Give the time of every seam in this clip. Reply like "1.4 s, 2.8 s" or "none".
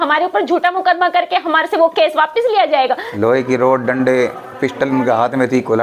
3.1 s